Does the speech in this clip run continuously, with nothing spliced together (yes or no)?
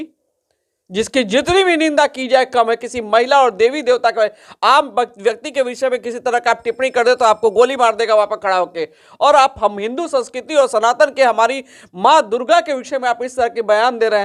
yes